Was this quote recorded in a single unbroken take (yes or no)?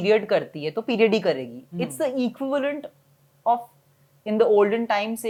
yes